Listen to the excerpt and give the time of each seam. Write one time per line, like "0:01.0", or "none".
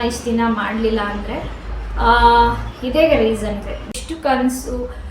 0:03.9